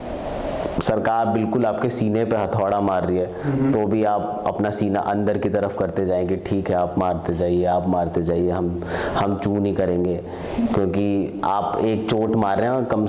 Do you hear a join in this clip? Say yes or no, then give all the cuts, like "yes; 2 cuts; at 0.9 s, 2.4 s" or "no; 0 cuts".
no; 0 cuts